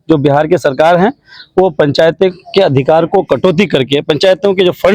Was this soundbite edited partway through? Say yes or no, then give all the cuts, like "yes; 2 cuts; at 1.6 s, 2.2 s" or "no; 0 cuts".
no; 0 cuts